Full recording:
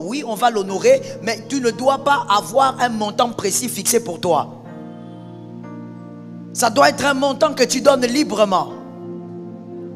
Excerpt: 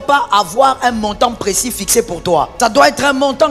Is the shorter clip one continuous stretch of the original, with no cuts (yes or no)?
no